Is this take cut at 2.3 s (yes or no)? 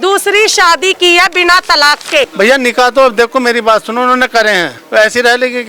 yes